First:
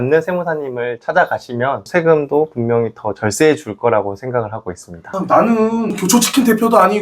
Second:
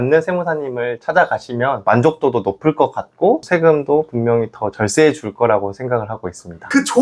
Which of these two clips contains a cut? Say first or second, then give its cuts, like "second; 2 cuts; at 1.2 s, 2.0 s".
first; 2 cuts; at 1.8 s, 5.1 s